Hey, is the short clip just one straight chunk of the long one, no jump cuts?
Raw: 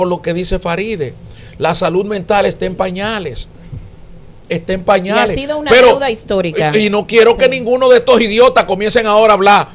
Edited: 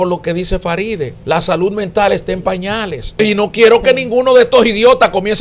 no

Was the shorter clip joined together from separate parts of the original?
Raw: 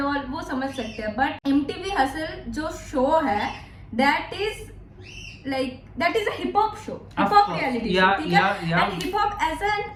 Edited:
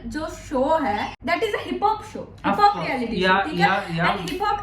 yes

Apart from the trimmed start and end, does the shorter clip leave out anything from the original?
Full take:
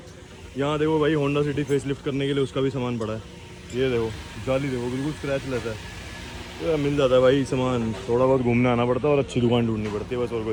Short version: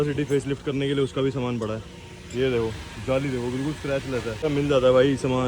yes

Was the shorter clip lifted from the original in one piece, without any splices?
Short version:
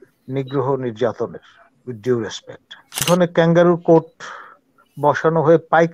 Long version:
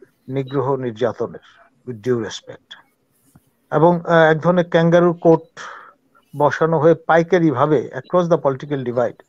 no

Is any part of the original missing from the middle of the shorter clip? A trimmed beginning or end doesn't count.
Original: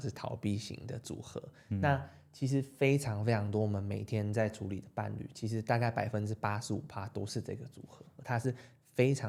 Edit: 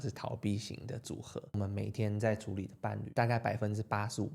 yes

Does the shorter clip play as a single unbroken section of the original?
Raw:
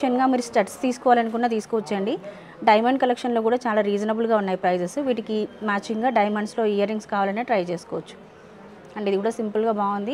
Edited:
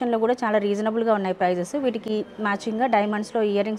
yes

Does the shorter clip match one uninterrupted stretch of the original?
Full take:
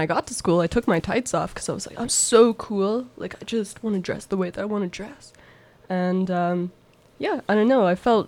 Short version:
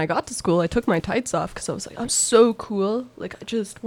yes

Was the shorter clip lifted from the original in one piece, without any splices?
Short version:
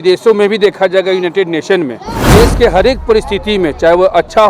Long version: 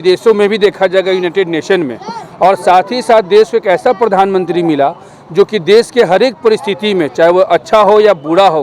no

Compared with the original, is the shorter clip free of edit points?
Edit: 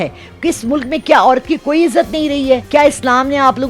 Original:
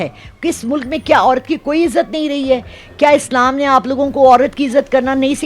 no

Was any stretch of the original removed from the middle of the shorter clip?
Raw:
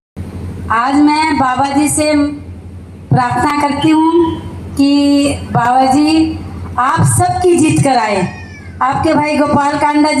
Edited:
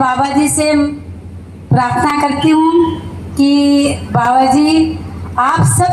no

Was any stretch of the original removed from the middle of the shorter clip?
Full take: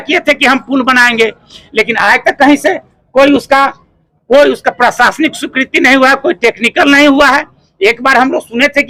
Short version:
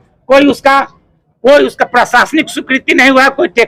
no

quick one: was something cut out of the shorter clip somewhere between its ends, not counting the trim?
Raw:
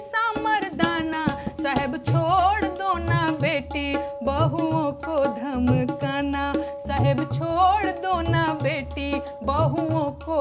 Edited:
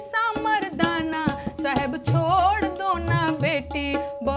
no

